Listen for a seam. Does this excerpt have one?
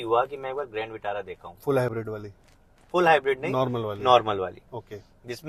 no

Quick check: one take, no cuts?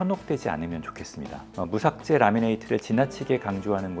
yes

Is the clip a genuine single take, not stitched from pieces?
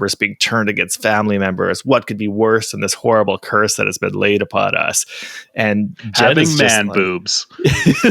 yes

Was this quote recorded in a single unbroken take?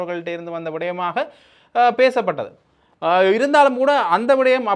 yes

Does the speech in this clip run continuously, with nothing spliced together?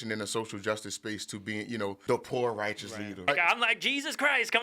no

